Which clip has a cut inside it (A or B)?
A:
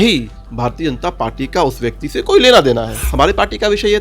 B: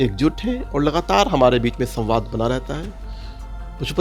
A